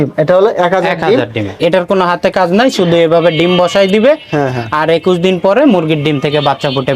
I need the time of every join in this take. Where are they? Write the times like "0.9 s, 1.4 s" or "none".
1.6 s